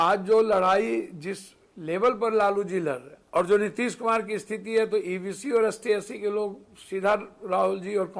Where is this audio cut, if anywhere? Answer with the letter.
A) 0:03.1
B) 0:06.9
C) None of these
A